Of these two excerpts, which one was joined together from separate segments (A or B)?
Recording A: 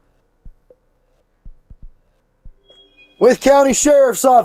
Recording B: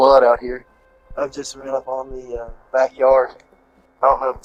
A